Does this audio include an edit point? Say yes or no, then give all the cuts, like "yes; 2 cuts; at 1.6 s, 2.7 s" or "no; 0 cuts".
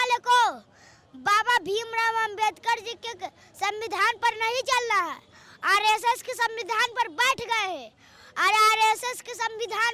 no; 0 cuts